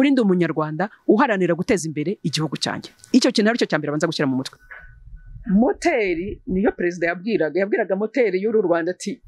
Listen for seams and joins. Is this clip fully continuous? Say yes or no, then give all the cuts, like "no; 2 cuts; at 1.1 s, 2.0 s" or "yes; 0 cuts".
no; 1 cut; at 4.6 s